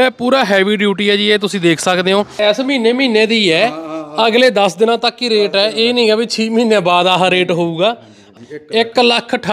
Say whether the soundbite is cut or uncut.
cut